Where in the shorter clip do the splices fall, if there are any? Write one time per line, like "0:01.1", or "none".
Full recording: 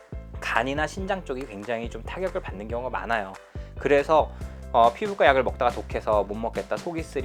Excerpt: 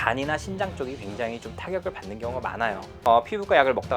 0:02.9